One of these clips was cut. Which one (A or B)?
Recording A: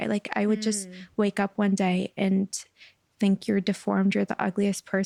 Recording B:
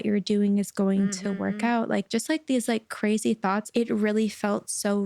B